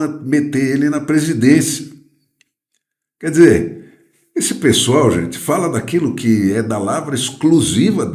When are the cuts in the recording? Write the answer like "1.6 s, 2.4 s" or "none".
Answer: none